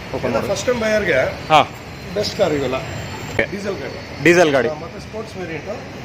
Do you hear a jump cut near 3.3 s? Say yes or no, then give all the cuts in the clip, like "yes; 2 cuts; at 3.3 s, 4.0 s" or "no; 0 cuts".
yes; 1 cut; at 3.3 s